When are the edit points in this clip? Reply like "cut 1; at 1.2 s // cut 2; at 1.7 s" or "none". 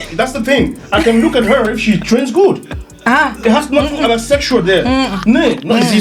none